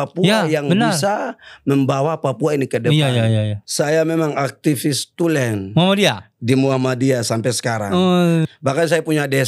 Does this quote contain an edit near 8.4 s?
yes; 2 cuts; at 3.6 s, 8.4 s

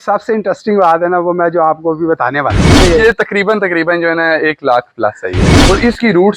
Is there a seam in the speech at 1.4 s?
no; 2 cuts; at 2.8 s, 5.5 s

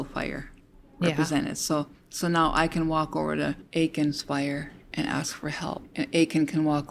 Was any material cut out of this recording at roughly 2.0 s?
no; 1 cut; at 3.6 s

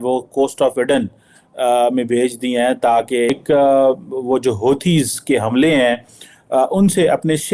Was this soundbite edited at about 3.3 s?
yes; 1 cut; at 3.3 s

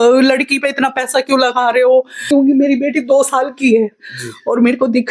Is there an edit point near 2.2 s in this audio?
yes; 1 cut; at 2.2 s

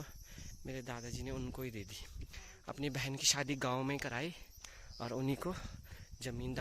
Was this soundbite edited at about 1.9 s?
no; 0 cuts

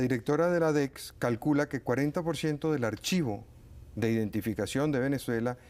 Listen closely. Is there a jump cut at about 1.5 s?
no; 1 cut; at 3.4 s

